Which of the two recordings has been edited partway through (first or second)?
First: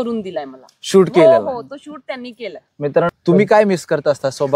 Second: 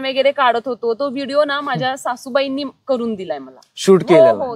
first